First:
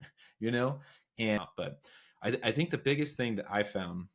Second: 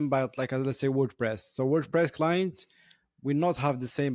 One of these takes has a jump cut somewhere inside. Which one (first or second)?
first